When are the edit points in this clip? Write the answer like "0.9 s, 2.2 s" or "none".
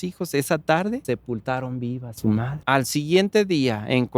1.0 s, 2.5 s